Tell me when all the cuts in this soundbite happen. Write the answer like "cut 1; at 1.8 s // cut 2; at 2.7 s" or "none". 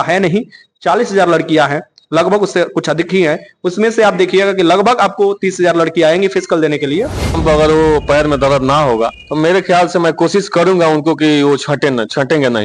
cut 1; at 7.4 s